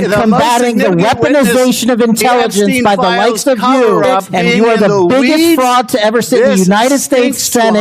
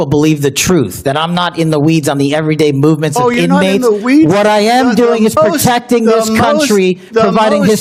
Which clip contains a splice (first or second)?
first